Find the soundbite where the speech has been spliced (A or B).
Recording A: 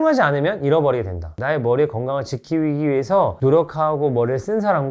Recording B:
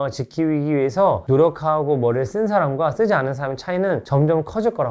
A